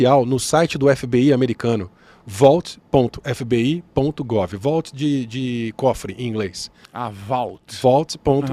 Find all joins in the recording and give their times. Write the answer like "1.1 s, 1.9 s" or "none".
none